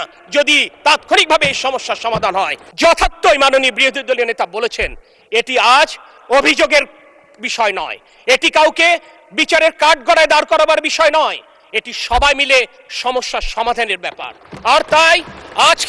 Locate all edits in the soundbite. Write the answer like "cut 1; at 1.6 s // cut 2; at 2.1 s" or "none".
cut 1; at 2.6 s